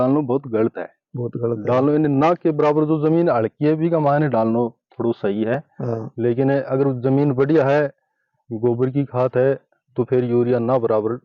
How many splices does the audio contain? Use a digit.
0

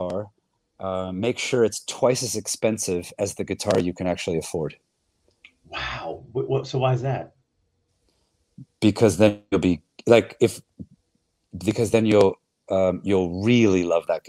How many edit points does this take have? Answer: 0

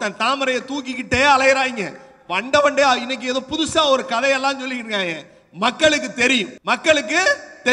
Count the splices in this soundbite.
1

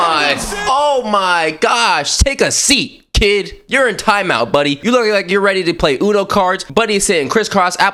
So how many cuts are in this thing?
0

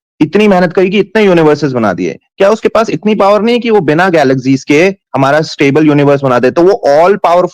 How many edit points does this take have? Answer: 0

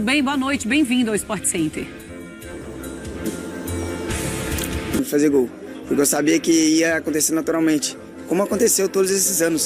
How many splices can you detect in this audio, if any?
1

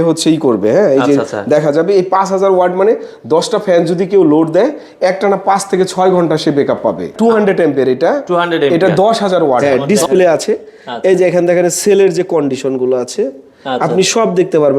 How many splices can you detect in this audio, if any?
2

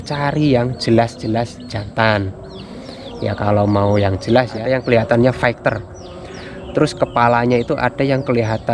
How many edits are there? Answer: 1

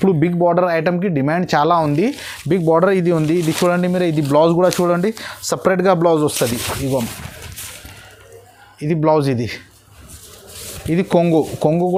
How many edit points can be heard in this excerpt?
0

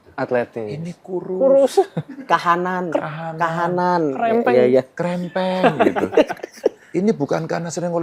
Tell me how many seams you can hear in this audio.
0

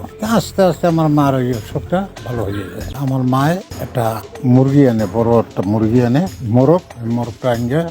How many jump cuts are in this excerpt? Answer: 1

